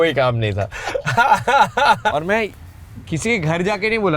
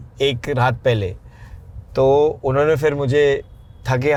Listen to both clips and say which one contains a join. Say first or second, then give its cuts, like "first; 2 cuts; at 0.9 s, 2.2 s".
first; 1 cut; at 2.2 s